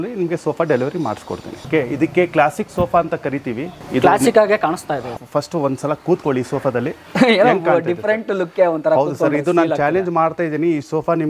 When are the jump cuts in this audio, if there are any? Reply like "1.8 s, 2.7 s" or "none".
1.6 s, 3.8 s, 5.1 s